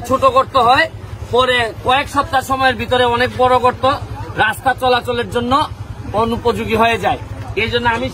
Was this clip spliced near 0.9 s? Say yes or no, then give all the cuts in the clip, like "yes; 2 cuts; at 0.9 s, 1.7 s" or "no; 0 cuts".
no; 0 cuts